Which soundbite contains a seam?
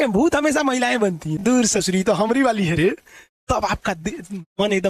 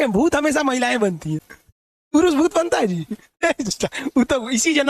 first; 1 cut; at 1.4 s

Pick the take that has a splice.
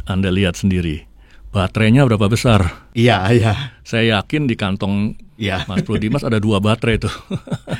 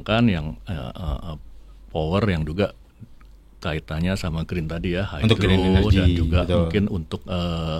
first; 2 cuts; at 2.8 s, 5.3 s

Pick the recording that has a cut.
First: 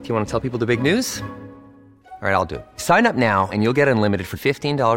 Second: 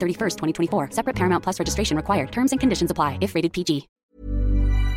second; 1 cut; at 3.9 s

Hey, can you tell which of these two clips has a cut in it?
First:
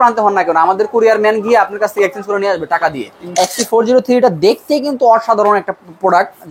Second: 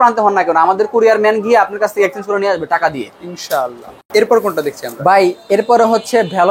first; 1 cut; at 3.2 s

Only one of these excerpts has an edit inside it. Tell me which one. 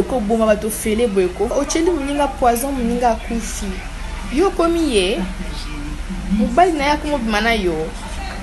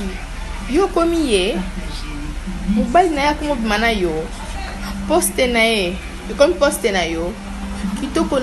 first; 1 cut; at 1.5 s

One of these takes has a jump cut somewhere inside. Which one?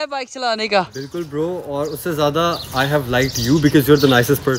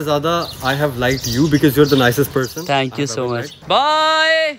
second; 1 cut; at 3.6 s

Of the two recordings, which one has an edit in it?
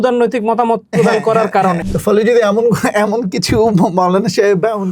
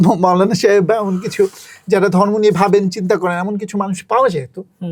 first; 1 cut; at 1.8 s

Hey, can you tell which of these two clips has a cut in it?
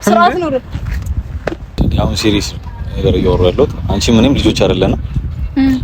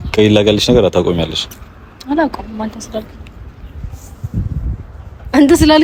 first; 1 cut; at 1.8 s

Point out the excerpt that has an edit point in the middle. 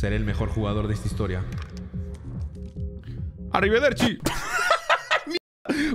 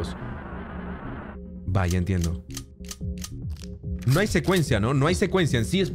second; 1 cut; at 1.6 s

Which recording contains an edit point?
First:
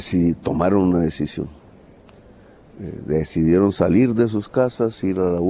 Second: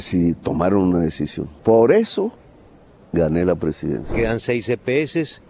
second; 2 cuts; at 1.4 s, 4.1 s

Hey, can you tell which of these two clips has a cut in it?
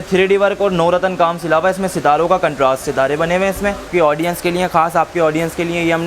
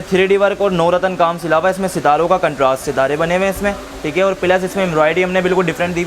first; 1 cut; at 3.9 s

